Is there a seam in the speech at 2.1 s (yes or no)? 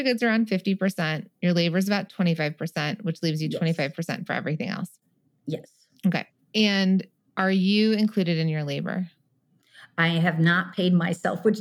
no